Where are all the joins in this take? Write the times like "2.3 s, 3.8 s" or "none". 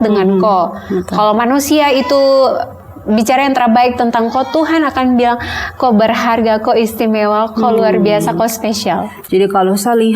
9.1 s